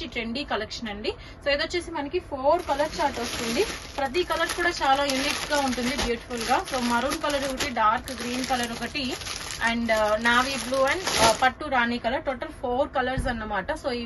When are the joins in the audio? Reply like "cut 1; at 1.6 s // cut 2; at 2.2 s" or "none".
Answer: none